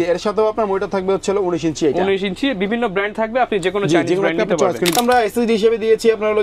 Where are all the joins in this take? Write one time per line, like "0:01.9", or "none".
0:05.0